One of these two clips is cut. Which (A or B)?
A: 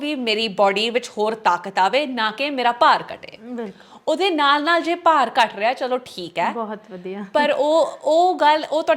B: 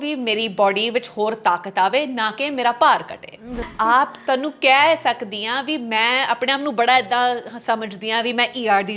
B